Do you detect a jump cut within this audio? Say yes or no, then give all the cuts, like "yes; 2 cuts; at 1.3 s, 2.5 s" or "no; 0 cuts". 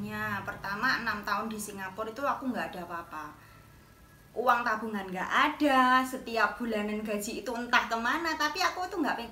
no; 0 cuts